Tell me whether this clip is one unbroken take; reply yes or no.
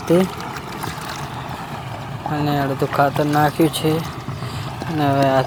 yes